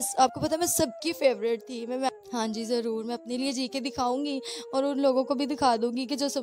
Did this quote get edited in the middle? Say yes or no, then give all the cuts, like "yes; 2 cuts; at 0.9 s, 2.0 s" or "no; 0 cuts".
yes; 1 cut; at 2.1 s